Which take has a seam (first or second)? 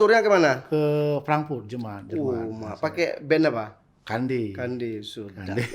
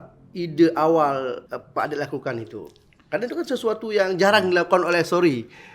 second